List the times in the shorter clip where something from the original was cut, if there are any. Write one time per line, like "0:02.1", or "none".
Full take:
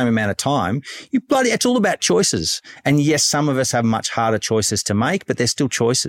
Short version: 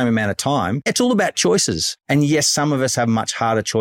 0:00.9
0:01.9